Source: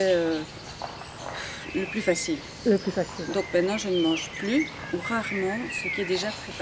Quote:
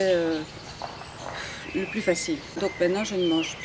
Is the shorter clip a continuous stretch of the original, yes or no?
no